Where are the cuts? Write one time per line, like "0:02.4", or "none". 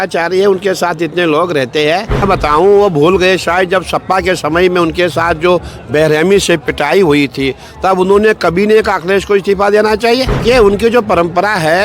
0:02.2
0:10.4